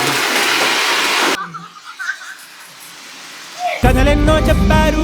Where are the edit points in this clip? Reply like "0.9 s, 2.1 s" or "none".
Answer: 1.3 s